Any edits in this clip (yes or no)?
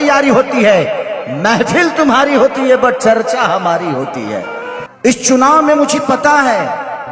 yes